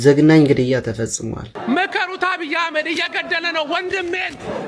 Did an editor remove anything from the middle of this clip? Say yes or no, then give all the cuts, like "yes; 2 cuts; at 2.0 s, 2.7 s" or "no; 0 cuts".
yes; 1 cut; at 1.5 s